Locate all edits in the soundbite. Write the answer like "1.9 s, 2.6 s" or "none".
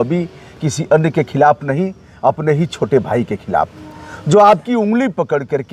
none